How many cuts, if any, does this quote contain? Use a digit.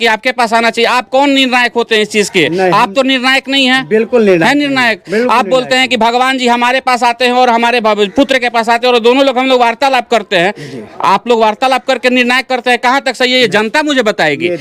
0